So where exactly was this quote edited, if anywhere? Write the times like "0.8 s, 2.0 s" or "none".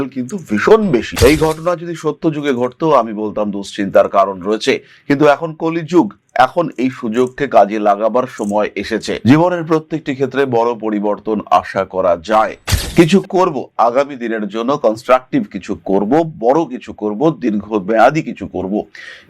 1.1 s, 12.7 s